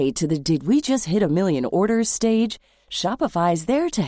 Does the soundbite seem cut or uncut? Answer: uncut